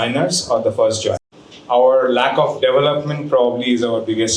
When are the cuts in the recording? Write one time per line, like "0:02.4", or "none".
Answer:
0:01.3